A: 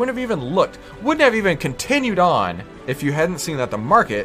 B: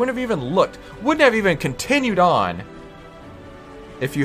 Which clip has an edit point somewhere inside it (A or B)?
A